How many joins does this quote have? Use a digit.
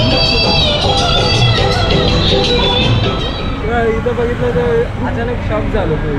1